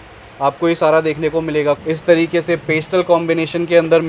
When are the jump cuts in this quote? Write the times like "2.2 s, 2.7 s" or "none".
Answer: 1.8 s